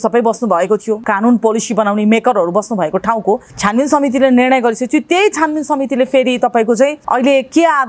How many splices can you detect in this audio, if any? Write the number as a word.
three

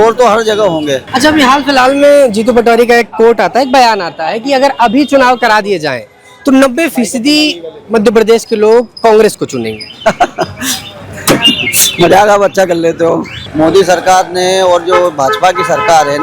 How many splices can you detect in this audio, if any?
two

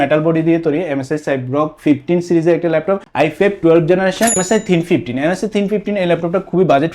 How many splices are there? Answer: two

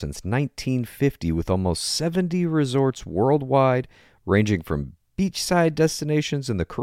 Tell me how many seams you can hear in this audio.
zero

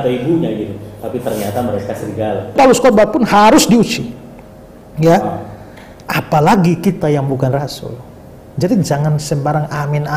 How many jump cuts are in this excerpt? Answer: one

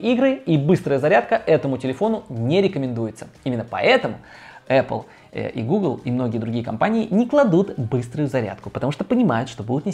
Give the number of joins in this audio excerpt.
zero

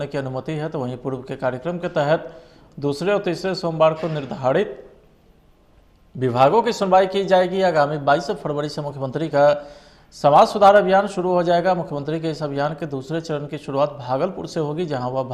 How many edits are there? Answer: zero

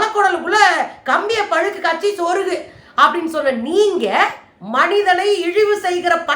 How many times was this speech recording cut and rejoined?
one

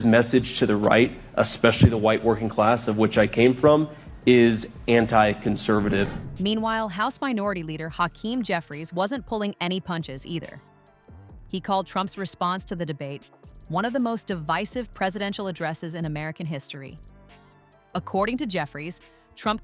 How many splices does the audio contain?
zero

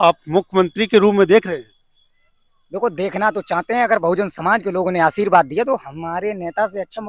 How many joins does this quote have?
zero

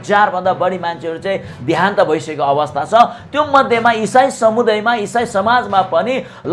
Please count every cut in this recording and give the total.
zero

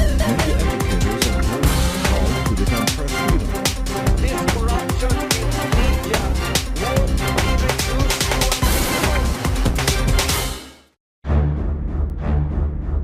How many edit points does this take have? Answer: zero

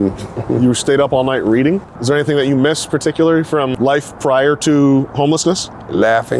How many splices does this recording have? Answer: two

